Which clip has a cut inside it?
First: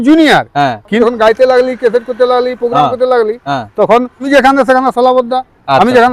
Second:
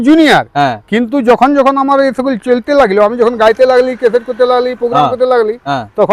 first; 2 cuts; at 1.0 s, 4.3 s

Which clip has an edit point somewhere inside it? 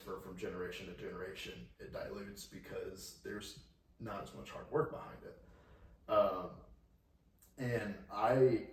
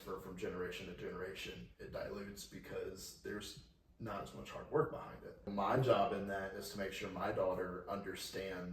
second; 1 cut; at 5.5 s

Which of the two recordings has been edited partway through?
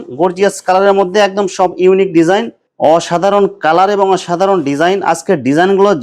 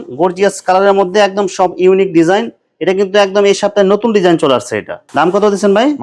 first; 1 cut; at 2.6 s

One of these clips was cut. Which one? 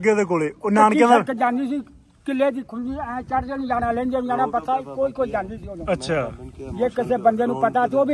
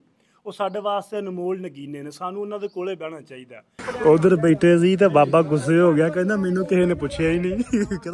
second; 1 cut; at 4.0 s

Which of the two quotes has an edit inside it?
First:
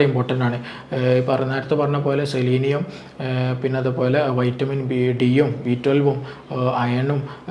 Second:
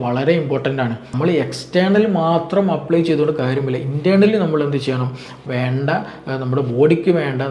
second; 1 cut; at 1.0 s

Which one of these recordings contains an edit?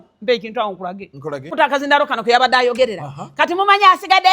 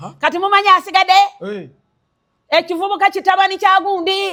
first; 1 cut; at 1.5 s

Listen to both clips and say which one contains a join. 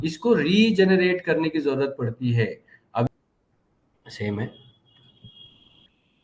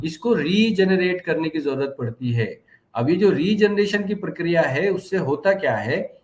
first; 1 cut; at 3.1 s

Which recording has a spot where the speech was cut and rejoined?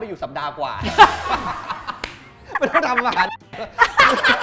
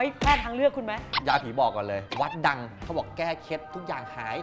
second; 2 cuts; at 1.0 s, 2.7 s

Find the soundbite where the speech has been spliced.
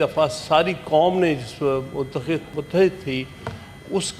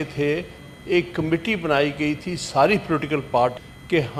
first; 1 cut; at 2.5 s

